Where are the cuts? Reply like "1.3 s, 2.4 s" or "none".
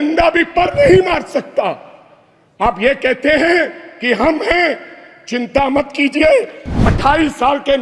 6.9 s